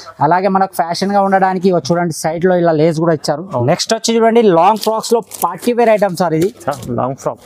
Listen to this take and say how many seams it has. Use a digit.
1